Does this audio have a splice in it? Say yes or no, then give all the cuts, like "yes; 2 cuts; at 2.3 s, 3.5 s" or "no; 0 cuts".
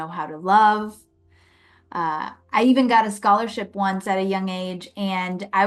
no; 0 cuts